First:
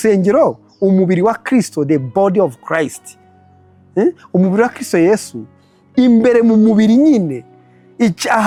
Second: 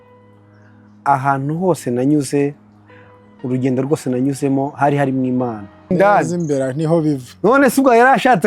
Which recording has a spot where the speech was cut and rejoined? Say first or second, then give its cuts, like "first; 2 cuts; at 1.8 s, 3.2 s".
second; 1 cut; at 5.9 s